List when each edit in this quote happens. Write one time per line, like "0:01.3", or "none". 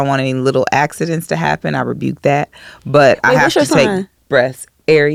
none